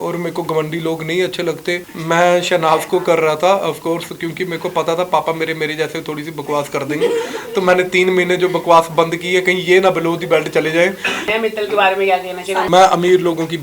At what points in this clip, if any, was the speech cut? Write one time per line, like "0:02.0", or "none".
0:01.9
0:11.3
0:12.7